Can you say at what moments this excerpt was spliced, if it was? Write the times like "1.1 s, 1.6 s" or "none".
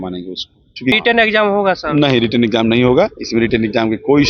1.0 s